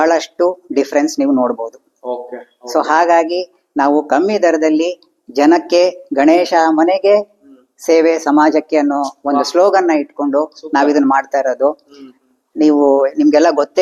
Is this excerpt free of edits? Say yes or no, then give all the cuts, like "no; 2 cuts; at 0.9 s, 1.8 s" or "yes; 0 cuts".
yes; 0 cuts